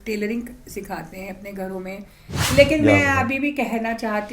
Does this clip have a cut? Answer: yes; 1 cut; at 2.5 s

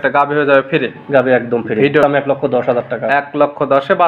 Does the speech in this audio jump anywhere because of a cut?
yes; 1 cut; at 2.0 s

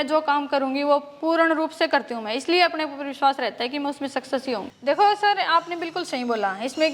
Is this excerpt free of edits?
no; 1 cut; at 4.7 s

